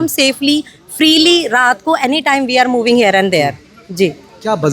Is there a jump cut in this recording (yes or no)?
no